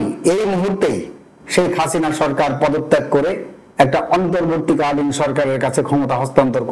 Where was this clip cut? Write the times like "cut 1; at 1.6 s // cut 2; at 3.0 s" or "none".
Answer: none